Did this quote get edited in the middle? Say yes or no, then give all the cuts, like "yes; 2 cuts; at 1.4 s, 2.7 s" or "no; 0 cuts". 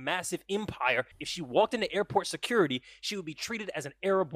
yes; 1 cut; at 1.2 s